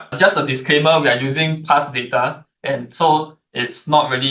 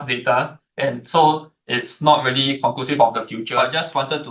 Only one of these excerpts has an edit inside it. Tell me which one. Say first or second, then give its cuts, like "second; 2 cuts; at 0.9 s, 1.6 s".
second; 1 cut; at 3.4 s